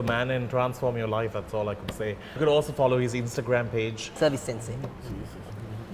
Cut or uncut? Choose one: cut